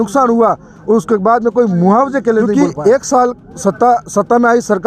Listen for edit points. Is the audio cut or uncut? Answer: cut